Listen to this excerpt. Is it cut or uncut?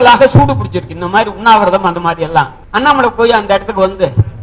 cut